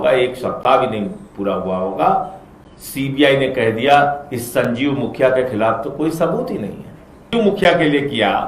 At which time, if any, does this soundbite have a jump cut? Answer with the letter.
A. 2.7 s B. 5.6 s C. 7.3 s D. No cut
C